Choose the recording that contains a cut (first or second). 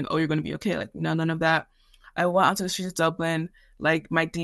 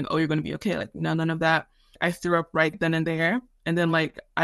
second